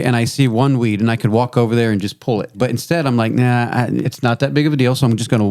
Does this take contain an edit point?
yes; 2 cuts; at 2.6 s, 4.1 s

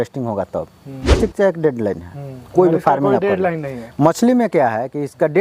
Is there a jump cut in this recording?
yes; 1 cut; at 1.2 s

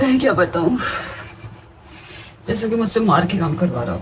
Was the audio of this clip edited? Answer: no; 0 cuts

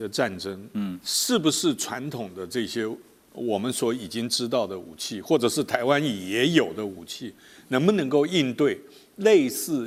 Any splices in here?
no; 0 cuts

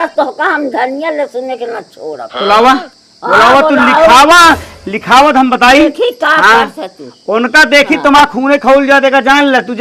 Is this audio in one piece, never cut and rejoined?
yes; 0 cuts

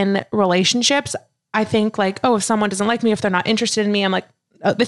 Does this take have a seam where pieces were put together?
no; 0 cuts

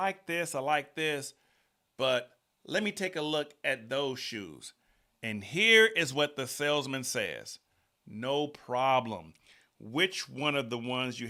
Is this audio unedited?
yes; 0 cuts

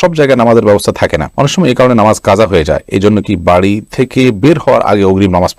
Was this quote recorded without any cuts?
yes; 0 cuts

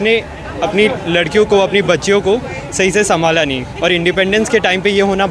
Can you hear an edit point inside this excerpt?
no; 0 cuts

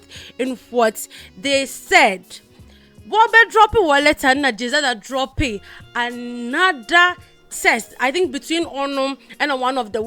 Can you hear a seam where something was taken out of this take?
no; 0 cuts

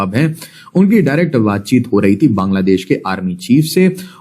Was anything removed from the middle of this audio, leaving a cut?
no; 0 cuts

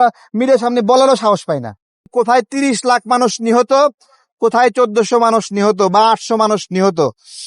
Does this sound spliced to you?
yes; 1 cut; at 2.1 s

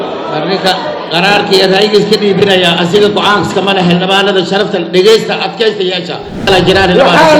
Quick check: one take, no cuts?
no; 1 cut; at 6.5 s

